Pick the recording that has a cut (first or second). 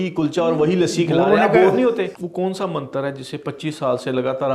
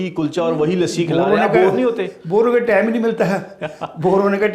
first